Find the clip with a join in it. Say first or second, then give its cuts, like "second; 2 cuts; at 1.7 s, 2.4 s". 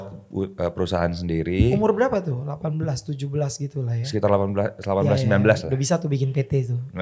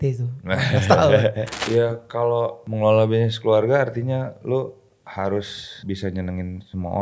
second; 3 cuts; at 1.5 s, 2.6 s, 5.8 s